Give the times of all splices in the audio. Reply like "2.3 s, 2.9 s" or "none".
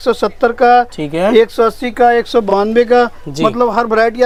none